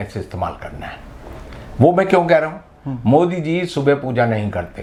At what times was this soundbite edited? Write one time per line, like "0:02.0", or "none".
none